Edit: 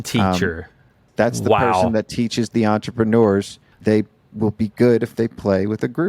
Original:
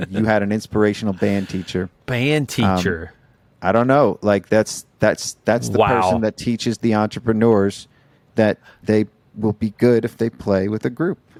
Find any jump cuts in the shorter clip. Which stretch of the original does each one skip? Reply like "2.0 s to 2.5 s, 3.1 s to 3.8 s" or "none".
3.4 s to 5.3 s, 8.0 s to 8.7 s